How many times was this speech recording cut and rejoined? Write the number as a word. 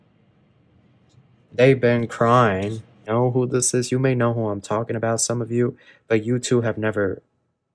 one